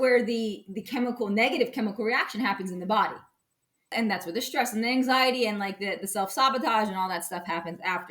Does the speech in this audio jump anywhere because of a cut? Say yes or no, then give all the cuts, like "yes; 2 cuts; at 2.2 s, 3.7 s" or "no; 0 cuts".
yes; 1 cut; at 3.9 s